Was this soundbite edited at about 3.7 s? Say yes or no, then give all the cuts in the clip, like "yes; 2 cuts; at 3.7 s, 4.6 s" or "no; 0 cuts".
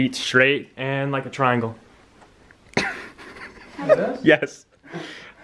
no; 0 cuts